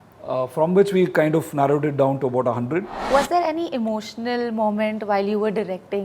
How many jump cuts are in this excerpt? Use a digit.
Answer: 1